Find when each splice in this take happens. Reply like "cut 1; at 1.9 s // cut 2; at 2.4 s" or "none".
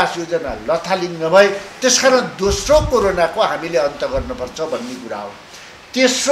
none